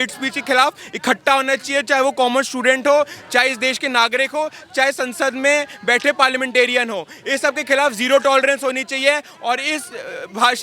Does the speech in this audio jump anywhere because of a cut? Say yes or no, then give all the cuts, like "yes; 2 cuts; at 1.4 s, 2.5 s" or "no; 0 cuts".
no; 0 cuts